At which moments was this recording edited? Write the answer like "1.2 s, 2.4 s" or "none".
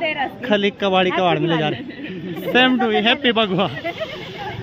none